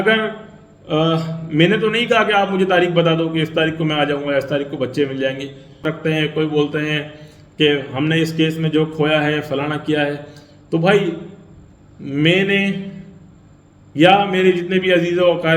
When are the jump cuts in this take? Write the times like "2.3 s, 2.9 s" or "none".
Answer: 5.8 s